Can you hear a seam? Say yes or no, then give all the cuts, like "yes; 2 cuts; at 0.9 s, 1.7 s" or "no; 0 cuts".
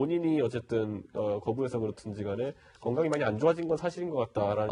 yes; 1 cut; at 2.7 s